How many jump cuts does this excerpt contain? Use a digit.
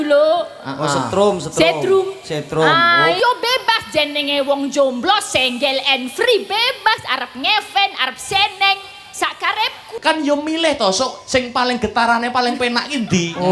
2